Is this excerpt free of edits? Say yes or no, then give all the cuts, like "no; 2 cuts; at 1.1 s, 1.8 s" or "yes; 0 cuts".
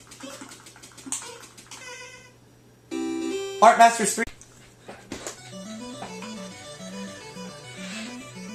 yes; 0 cuts